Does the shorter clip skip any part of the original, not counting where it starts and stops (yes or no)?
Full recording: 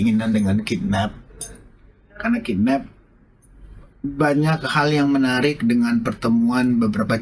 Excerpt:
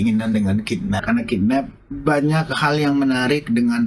yes